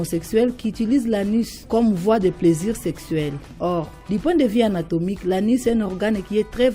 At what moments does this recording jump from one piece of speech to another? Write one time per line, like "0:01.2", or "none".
0:01.6
0:03.7